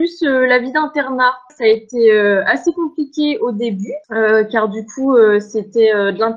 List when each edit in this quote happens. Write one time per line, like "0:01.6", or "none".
0:01.5
0:04.0